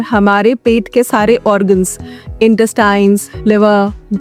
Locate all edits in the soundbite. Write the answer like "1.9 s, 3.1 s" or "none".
none

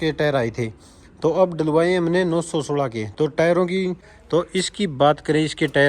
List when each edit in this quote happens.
4.1 s

